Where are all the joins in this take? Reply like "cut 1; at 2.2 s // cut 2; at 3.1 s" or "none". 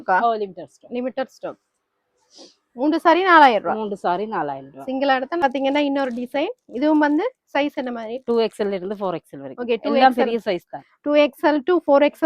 cut 1; at 5.4 s